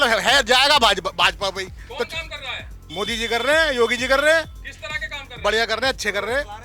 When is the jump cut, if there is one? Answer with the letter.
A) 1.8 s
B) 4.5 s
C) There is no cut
C